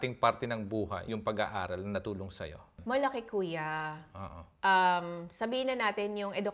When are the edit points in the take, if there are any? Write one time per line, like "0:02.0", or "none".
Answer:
0:01.1
0:02.8